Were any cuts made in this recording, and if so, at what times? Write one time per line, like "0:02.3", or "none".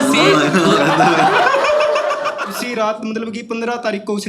0:02.5